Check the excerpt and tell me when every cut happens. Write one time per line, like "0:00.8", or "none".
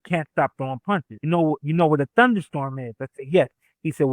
0:01.2